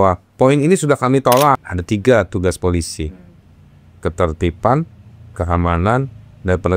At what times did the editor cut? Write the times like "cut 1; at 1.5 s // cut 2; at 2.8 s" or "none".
cut 1; at 1.6 s